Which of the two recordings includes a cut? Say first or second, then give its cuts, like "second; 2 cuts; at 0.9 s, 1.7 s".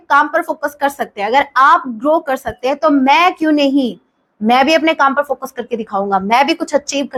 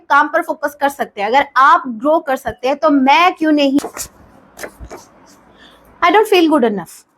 second; 1 cut; at 3.8 s